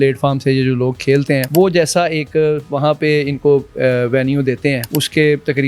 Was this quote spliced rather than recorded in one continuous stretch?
yes; 2 cuts; at 1.5 s, 4.8 s

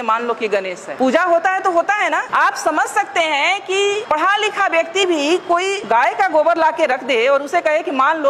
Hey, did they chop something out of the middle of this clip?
no; 0 cuts

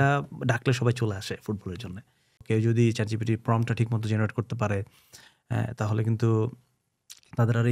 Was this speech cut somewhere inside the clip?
yes; 1 cut; at 2.4 s

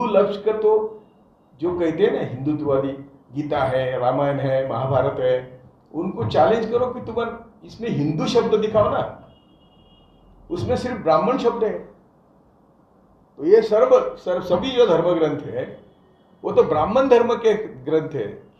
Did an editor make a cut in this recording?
no; 0 cuts

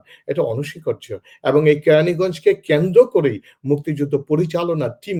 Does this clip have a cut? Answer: no; 0 cuts

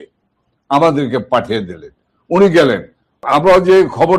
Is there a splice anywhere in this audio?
yes; 1 cut; at 3.2 s

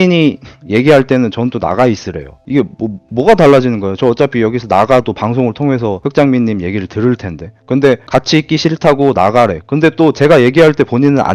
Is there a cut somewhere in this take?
no; 0 cuts

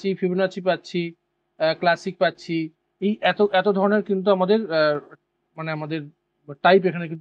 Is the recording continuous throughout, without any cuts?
yes; 0 cuts

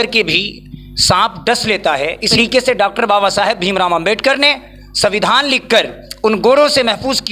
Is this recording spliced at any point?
yes; 1 cut; at 2.3 s

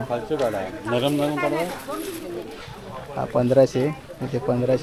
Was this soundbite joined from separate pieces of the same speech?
no; 0 cuts

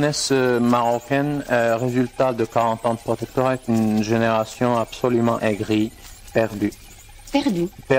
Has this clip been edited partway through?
yes; 1 cut; at 6.3 s

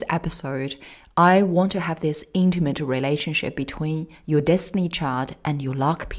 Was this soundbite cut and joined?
no; 0 cuts

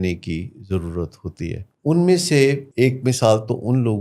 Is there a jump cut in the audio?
yes; 2 cuts; at 1.7 s, 2.7 s

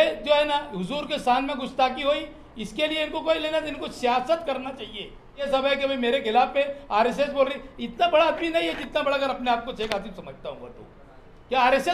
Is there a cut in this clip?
yes; 1 cut; at 5.5 s

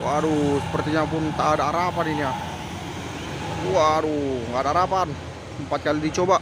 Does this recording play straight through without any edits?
yes; 0 cuts

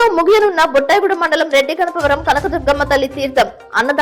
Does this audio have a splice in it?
no; 0 cuts

